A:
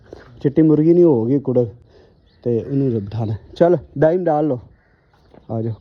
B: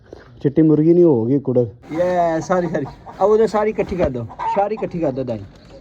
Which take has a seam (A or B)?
B